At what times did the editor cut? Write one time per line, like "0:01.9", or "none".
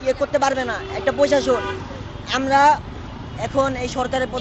none